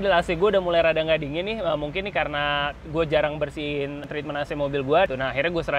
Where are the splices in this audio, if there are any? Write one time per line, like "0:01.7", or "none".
0:04.0
0:05.1

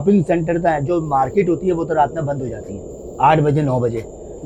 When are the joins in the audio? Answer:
none

